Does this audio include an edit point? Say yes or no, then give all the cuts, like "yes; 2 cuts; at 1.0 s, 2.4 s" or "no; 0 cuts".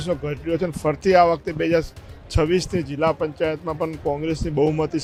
no; 0 cuts